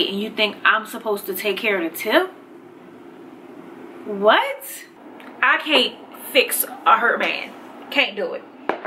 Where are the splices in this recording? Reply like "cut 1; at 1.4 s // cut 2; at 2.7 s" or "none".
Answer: cut 1; at 4.9 s